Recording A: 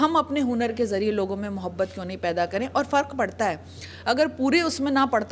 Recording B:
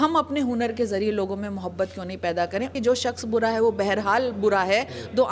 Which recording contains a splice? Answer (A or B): B